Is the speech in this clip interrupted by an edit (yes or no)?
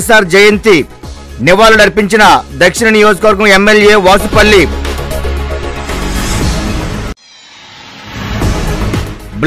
no